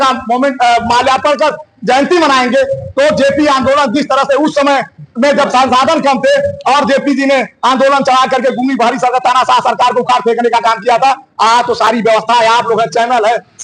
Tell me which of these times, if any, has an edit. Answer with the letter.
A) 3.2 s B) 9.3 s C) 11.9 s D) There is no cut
D